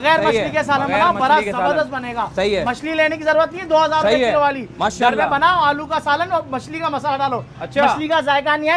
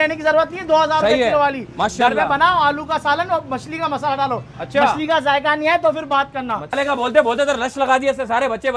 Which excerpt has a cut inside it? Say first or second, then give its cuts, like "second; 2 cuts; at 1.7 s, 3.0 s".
second; 1 cut; at 6.7 s